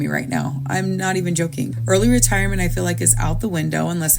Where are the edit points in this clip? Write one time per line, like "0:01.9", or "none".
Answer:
0:01.8